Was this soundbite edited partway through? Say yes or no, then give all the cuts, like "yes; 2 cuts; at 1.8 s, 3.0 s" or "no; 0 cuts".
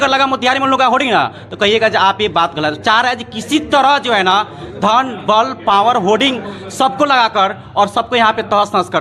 no; 0 cuts